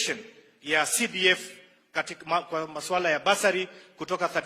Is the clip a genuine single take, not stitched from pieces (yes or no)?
yes